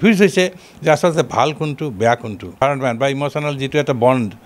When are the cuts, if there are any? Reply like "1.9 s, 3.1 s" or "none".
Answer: 2.6 s